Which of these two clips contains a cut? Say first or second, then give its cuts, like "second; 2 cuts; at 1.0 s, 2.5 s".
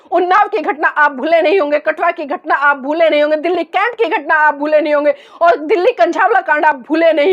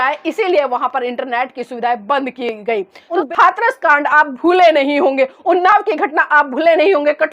second; 1 cut; at 3.1 s